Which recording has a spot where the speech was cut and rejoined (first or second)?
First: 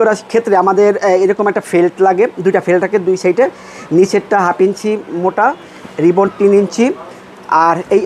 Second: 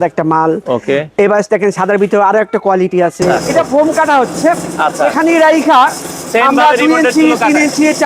second